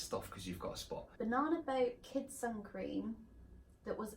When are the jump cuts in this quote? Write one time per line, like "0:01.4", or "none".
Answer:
0:01.1